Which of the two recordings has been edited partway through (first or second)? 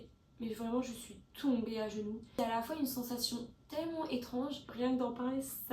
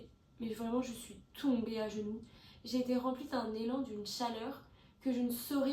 first